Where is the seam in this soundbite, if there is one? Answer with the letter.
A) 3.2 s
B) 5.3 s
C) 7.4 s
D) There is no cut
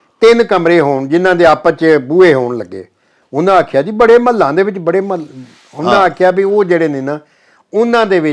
D